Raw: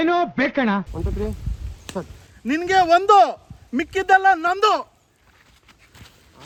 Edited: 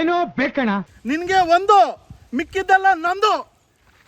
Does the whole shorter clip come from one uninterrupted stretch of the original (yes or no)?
no